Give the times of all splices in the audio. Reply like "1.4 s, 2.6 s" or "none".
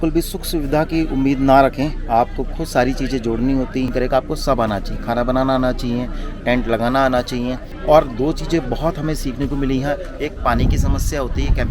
none